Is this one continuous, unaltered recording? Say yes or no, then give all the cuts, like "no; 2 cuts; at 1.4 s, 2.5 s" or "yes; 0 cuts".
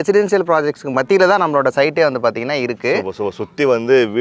yes; 0 cuts